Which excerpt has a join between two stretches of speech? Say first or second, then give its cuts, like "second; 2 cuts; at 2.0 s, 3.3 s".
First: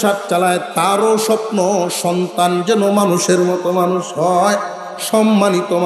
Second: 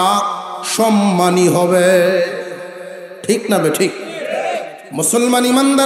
second; 1 cut; at 4.8 s